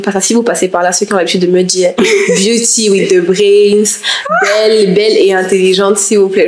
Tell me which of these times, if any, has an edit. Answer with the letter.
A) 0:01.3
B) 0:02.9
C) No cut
C